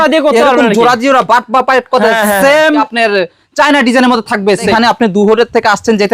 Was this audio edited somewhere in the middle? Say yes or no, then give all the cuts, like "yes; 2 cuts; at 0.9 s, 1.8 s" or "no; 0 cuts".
yes; 2 cuts; at 2.9 s, 4.7 s